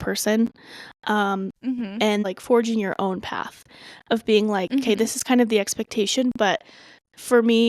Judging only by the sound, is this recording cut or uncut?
cut